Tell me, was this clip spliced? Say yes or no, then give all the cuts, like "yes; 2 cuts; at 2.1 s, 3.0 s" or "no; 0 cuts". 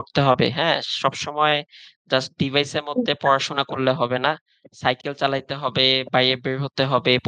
no; 0 cuts